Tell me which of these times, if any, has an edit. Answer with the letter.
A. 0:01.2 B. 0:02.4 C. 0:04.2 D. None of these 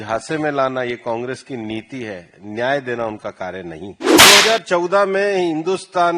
C